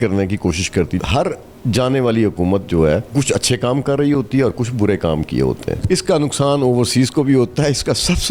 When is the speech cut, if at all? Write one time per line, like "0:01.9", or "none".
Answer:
0:01.0
0:03.1
0:05.8